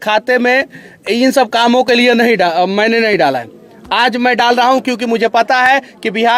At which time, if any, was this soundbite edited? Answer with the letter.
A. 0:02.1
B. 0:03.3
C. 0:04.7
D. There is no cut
D